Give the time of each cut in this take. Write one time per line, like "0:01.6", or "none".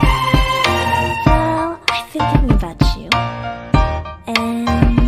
none